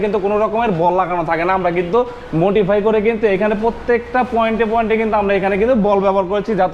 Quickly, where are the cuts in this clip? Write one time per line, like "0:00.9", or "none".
none